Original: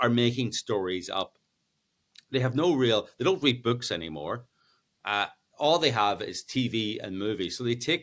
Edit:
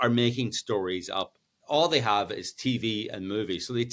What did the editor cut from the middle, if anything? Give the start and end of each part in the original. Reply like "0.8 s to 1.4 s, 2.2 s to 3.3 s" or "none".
1.5 s to 5.4 s